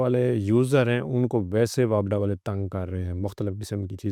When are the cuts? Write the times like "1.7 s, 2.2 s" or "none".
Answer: none